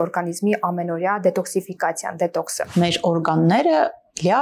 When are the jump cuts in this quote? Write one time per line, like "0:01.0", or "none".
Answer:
0:02.7